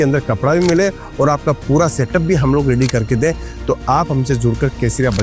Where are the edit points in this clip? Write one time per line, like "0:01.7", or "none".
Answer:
none